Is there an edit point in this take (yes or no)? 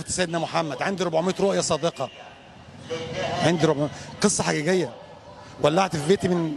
no